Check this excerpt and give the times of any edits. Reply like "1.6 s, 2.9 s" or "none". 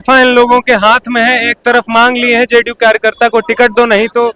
none